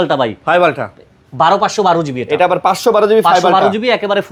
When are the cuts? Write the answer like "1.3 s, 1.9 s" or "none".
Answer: none